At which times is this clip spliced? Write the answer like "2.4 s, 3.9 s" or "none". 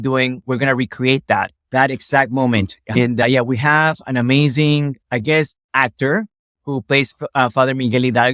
2.9 s